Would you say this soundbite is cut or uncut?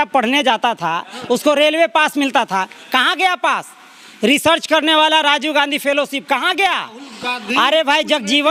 uncut